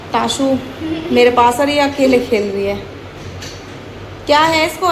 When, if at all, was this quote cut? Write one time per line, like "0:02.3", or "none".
none